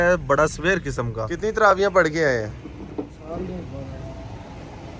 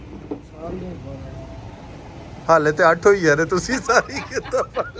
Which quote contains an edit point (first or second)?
first